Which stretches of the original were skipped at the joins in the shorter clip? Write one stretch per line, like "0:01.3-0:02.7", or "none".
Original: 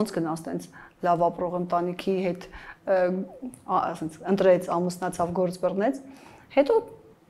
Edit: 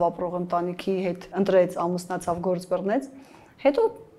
0:02.4-0:04.2